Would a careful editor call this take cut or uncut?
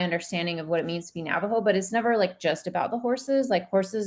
uncut